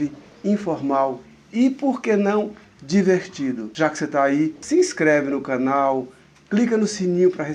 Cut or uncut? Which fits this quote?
uncut